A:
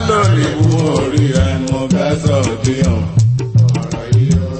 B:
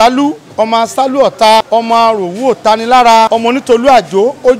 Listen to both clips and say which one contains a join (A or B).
B